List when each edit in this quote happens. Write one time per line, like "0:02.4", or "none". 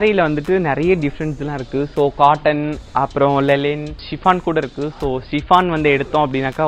0:04.0